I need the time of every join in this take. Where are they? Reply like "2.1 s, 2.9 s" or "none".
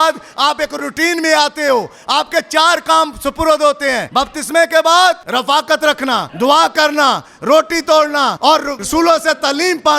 4.0 s, 5.2 s, 6.3 s, 8.5 s